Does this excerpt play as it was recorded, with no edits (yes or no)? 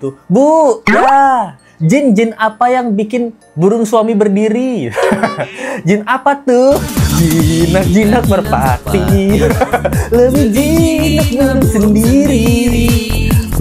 yes